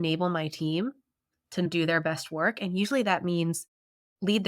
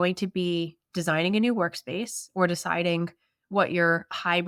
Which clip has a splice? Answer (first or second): first